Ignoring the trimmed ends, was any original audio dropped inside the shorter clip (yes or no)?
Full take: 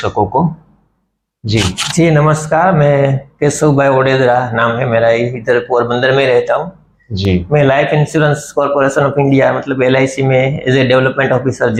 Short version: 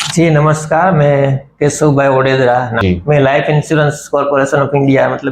yes